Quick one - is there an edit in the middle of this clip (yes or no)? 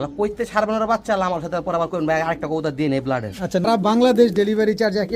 yes